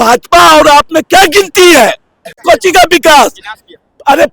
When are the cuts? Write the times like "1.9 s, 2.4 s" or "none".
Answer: 2.4 s